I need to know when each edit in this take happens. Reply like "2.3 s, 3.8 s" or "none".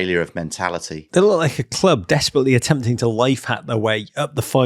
1.0 s